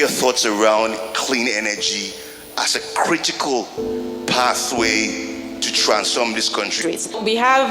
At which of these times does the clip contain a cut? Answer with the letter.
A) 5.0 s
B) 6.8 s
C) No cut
B